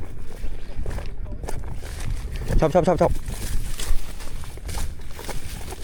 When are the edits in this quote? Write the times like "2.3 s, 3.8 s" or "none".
none